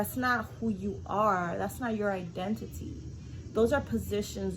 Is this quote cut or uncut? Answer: uncut